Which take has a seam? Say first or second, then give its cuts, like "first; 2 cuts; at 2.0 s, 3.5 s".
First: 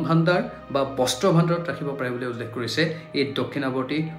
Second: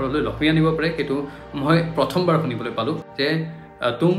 second; 1 cut; at 3.1 s